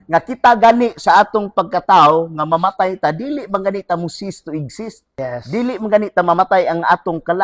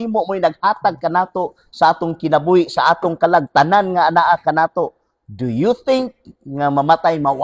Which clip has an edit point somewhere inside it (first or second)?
first